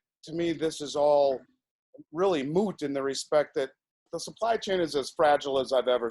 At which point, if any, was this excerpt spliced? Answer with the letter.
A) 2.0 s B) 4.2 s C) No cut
B